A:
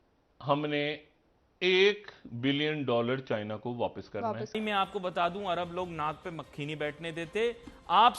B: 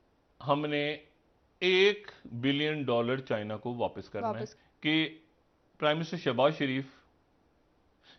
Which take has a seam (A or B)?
A